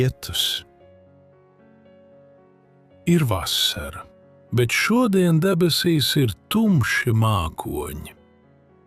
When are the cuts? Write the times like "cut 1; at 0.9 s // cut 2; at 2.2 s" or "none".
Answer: cut 1; at 1.2 s // cut 2; at 3.0 s